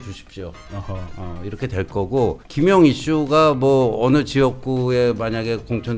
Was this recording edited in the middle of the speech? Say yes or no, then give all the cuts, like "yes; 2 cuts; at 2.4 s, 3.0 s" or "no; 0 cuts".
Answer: yes; 1 cut; at 2.4 s